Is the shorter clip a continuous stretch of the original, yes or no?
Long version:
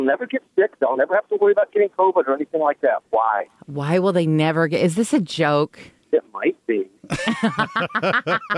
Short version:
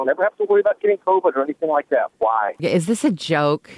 no